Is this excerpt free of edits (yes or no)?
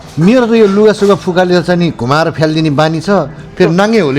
yes